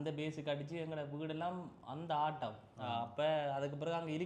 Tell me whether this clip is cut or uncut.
uncut